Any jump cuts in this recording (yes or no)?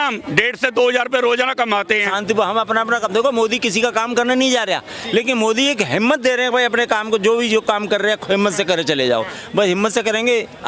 yes